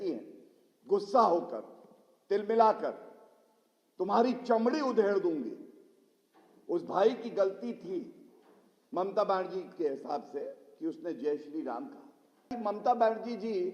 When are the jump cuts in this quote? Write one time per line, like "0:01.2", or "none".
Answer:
0:12.5

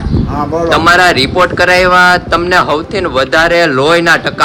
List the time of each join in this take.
none

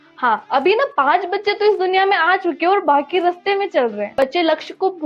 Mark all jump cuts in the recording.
0:03.9

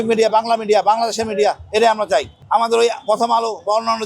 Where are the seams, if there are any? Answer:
0:02.4

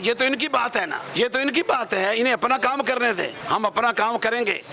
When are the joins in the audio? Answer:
0:01.0
0:03.4

